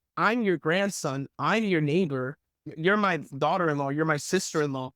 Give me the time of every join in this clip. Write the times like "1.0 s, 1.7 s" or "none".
2.6 s